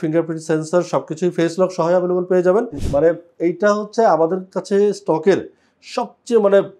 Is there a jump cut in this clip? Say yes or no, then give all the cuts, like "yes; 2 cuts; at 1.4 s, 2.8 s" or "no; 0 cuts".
yes; 1 cut; at 2.8 s